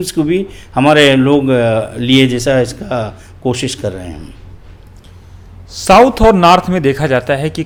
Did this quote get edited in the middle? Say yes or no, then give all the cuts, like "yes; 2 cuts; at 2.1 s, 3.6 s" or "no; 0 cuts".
no; 0 cuts